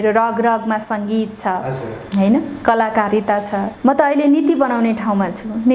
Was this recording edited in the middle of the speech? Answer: yes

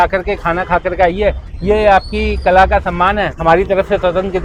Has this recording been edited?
no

